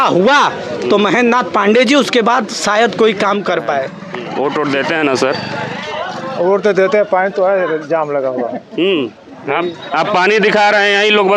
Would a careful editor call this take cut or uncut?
cut